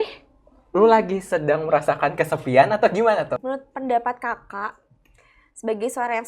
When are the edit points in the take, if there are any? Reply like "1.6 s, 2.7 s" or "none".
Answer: 3.4 s